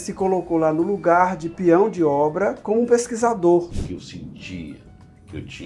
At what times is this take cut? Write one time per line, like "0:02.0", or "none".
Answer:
0:03.8